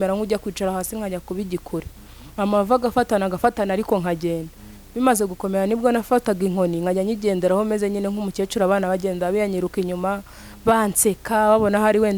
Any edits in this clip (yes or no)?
no